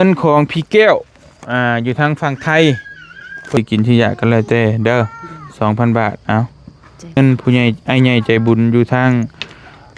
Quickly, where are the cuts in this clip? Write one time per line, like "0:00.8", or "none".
0:03.6
0:07.2